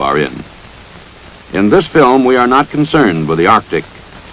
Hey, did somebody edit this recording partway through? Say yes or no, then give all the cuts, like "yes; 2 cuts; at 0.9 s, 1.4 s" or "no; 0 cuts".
yes; 1 cut; at 1.9 s